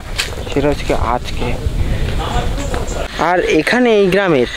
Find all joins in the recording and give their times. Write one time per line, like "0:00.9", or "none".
0:03.1